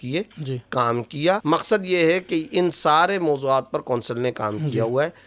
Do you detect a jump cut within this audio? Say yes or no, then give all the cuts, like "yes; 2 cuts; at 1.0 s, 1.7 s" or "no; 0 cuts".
yes; 1 cut; at 1.4 s